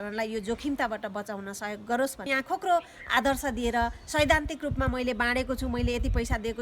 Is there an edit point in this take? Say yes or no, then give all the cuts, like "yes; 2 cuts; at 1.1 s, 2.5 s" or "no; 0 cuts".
yes; 1 cut; at 2.3 s